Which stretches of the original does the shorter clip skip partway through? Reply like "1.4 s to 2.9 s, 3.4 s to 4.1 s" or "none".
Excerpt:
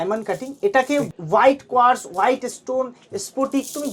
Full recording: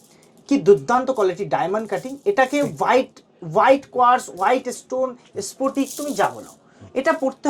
2.7 s to 3.3 s